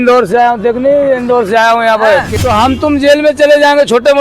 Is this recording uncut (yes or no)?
no